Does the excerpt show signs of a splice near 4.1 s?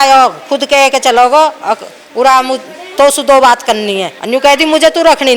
yes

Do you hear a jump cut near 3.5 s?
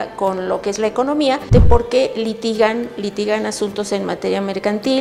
no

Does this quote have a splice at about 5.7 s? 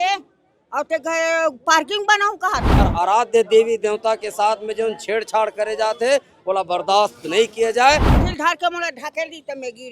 no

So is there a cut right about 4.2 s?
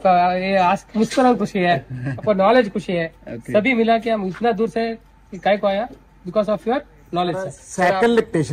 no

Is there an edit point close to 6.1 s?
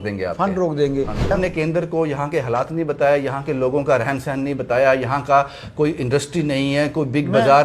no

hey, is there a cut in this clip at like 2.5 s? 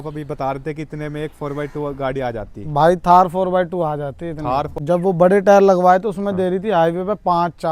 no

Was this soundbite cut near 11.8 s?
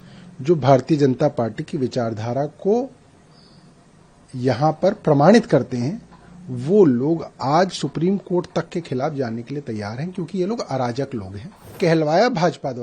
yes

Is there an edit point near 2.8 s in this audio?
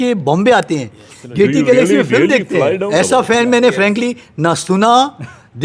yes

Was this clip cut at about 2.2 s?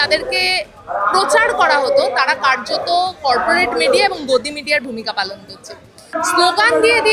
no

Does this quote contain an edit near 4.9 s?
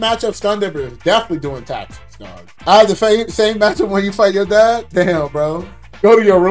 no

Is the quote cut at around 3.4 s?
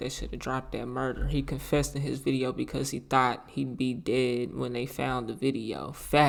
no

